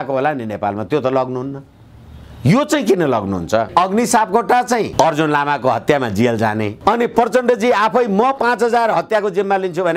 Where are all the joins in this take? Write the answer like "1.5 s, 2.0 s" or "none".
3.7 s, 4.9 s, 6.7 s

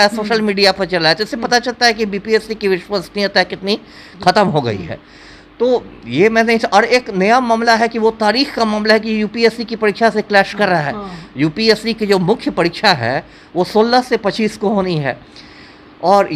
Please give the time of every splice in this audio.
none

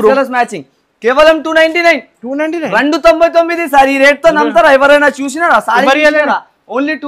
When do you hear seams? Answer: none

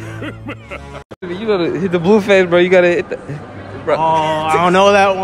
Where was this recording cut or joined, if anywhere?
1.2 s

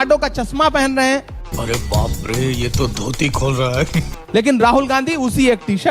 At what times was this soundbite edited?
1.4 s, 4.2 s

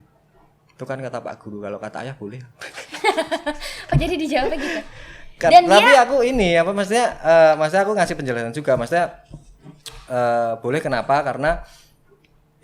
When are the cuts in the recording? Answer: none

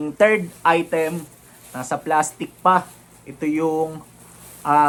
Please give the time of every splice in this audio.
none

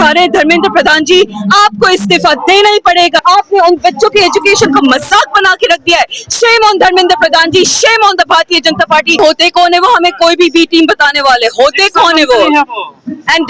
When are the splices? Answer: 3.2 s, 9.2 s

